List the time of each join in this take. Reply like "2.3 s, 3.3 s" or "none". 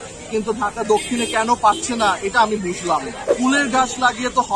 3.2 s